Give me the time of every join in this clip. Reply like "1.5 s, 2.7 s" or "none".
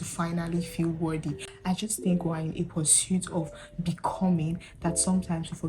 1.5 s